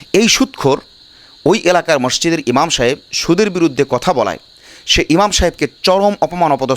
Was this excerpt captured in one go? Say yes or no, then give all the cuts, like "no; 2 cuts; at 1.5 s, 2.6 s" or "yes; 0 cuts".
yes; 0 cuts